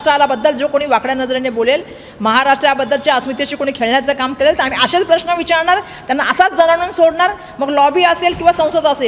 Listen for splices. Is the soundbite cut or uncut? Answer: uncut